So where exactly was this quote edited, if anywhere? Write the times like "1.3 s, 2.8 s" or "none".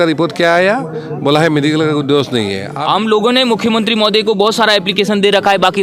2.7 s